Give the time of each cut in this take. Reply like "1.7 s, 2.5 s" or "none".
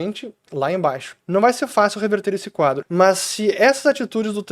1.1 s, 2.8 s